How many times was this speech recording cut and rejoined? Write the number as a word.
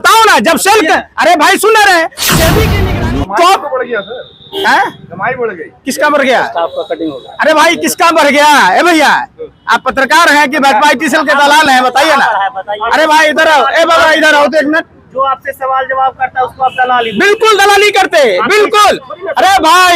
one